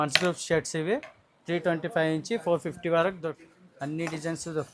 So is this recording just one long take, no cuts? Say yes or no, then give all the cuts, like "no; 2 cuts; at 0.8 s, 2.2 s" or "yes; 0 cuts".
no; 1 cut; at 3.3 s